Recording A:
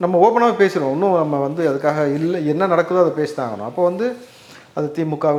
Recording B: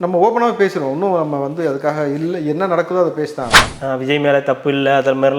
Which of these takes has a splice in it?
B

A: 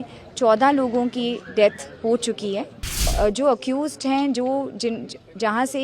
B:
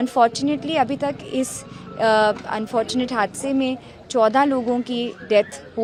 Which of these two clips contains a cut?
A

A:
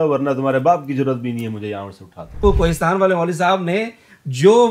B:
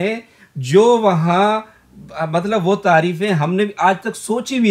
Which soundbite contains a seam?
A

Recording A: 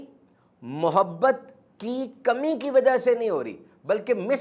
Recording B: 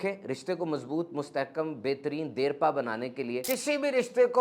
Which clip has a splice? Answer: B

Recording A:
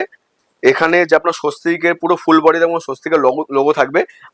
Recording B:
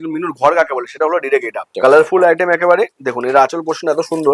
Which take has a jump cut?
B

